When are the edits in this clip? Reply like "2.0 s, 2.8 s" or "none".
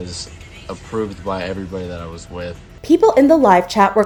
none